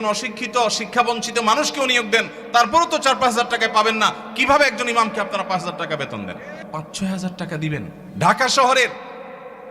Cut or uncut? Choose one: cut